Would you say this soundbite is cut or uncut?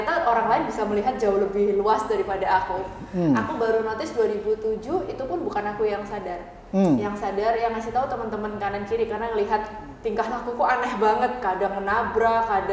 uncut